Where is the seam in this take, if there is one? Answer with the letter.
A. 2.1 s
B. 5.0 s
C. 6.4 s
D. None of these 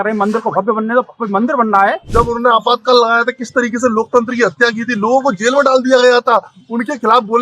A